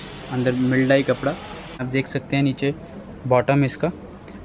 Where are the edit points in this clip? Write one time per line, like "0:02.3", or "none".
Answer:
0:01.8